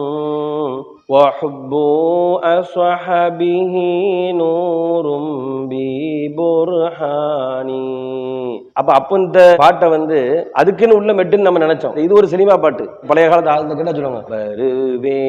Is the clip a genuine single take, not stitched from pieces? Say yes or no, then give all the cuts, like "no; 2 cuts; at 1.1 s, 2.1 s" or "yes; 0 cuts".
yes; 0 cuts